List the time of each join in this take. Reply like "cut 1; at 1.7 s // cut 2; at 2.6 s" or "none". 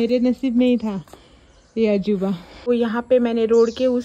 cut 1; at 2.7 s